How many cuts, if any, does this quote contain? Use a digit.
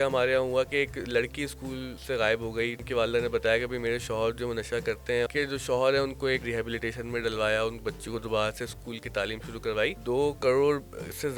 5